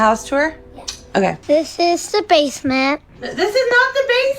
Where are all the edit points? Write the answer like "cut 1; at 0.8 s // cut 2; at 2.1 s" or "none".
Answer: cut 1; at 1.4 s